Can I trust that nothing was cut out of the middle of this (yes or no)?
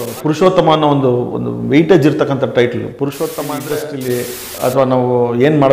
no